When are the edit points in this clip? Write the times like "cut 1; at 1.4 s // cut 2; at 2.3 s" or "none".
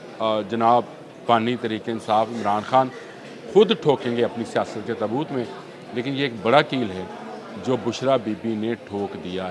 none

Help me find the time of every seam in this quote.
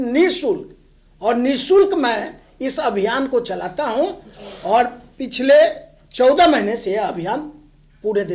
none

